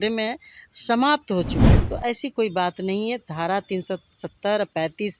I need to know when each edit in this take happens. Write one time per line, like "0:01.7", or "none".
0:01.6